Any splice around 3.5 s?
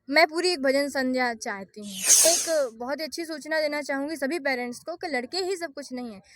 no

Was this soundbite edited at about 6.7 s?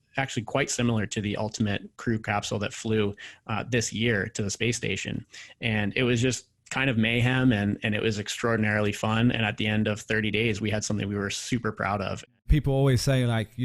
no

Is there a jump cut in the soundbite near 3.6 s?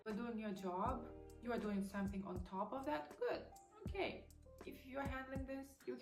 no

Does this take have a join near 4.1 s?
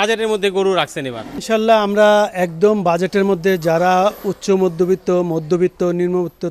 no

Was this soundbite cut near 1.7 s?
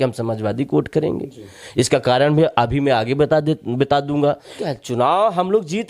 no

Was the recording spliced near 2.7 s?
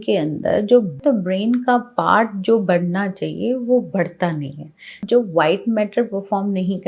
no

